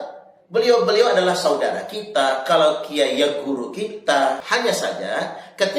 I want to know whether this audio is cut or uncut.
cut